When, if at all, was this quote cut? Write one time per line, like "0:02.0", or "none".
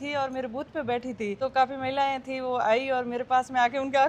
0:01.4